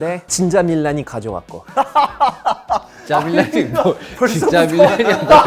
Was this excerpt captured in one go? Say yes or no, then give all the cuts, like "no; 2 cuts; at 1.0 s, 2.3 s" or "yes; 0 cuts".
yes; 0 cuts